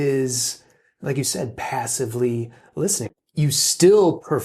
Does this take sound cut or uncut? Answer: cut